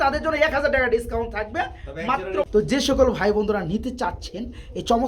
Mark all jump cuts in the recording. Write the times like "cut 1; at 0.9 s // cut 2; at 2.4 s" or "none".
cut 1; at 2.0 s